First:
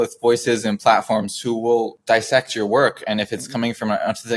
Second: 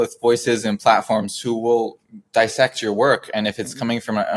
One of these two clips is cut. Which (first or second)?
first